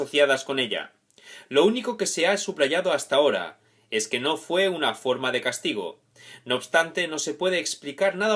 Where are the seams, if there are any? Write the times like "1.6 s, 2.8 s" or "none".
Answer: none

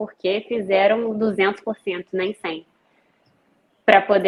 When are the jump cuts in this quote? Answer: none

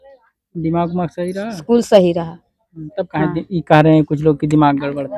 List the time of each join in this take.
none

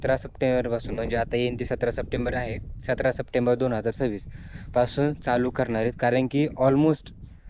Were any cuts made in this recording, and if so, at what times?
none

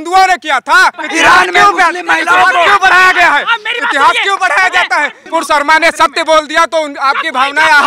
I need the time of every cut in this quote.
1.0 s, 5.2 s

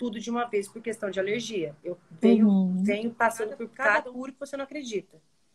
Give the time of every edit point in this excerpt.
3.9 s

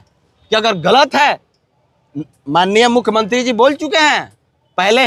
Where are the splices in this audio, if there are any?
none

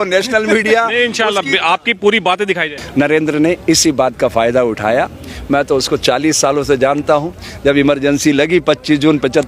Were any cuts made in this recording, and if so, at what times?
2.7 s

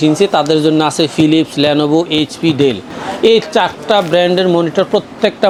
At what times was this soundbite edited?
none

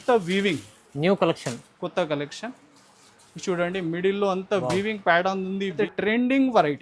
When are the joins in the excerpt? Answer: 5.8 s

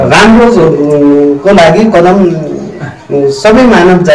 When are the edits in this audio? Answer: none

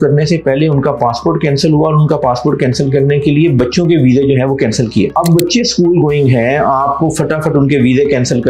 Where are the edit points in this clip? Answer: none

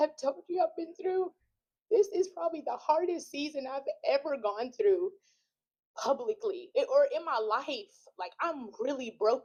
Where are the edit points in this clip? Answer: none

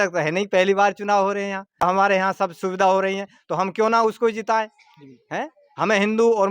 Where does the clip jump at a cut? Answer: 1.8 s

